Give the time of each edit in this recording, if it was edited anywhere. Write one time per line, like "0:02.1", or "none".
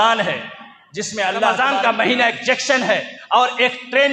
0:01.7